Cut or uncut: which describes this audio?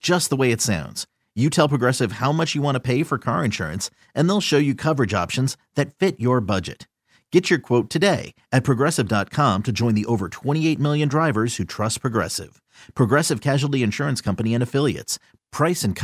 uncut